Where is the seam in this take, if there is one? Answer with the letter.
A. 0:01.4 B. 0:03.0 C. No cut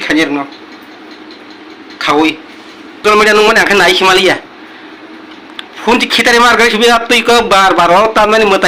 B